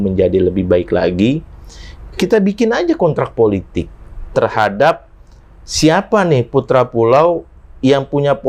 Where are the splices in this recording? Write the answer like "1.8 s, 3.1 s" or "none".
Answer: none